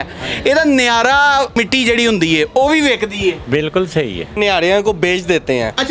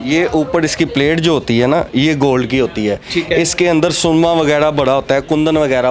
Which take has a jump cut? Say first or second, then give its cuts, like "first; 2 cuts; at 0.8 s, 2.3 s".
first; 2 cuts; at 1.6 s, 4.4 s